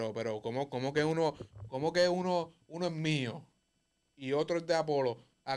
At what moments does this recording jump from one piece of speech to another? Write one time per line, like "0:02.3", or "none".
none